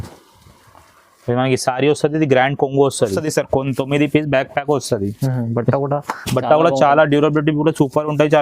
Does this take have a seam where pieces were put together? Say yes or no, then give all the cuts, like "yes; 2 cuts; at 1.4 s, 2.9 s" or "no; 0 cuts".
yes; 1 cut; at 3.2 s